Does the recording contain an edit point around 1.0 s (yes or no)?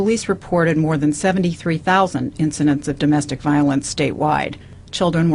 no